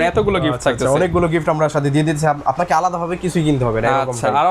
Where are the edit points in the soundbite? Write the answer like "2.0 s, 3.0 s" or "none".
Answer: none